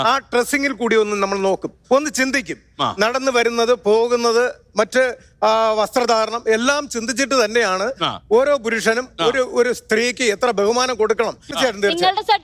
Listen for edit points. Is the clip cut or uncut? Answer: cut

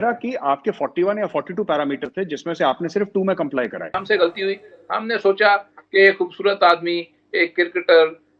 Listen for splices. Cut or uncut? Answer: cut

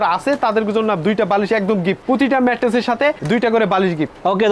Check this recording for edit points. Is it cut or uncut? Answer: uncut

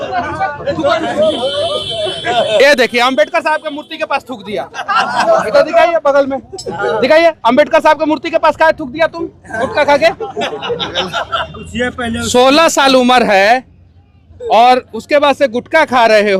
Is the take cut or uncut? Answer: uncut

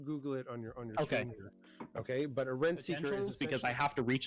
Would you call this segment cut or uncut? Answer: cut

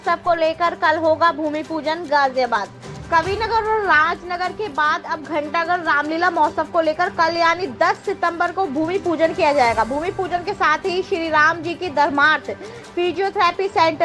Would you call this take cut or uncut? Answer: uncut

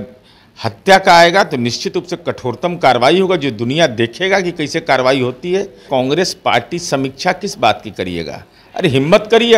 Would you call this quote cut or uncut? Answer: cut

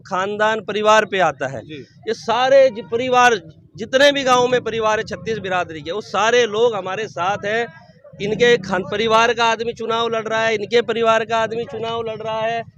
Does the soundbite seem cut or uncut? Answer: uncut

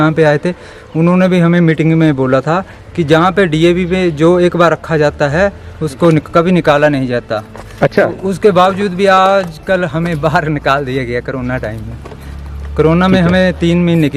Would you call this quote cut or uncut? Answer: uncut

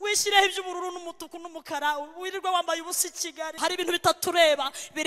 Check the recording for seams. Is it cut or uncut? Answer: cut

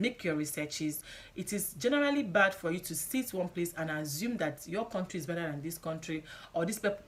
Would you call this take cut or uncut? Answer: uncut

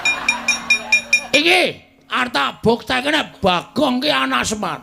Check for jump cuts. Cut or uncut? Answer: cut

